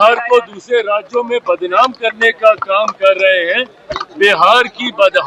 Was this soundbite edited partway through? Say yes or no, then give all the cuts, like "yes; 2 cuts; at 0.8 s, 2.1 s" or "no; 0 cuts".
no; 0 cuts